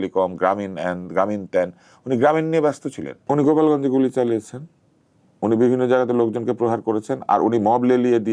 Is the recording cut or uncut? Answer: cut